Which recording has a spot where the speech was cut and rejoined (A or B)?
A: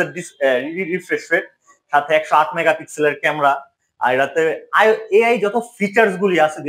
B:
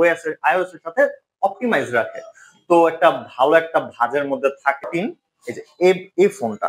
B